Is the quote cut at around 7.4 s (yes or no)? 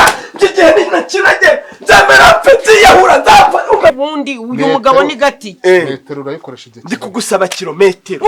no